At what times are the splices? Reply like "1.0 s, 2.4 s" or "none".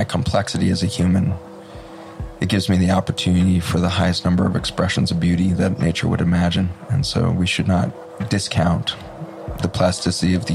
8.0 s